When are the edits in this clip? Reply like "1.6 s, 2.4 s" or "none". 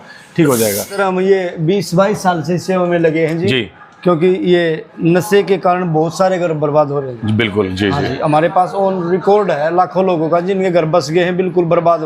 1.0 s